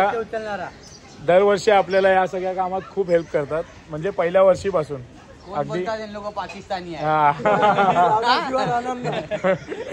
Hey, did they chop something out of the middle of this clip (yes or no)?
no